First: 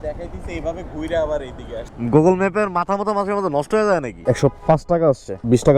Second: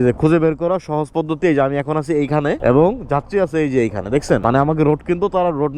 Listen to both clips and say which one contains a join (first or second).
first